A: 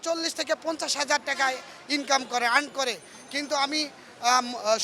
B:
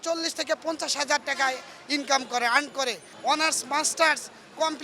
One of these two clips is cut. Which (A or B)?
B